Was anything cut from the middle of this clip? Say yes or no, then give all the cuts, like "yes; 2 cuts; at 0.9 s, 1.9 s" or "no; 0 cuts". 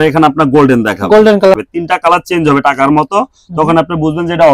yes; 1 cut; at 1.4 s